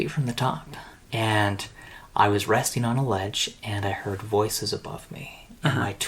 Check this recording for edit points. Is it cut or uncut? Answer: cut